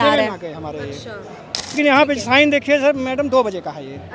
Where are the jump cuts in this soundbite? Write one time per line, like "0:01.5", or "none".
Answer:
0:01.8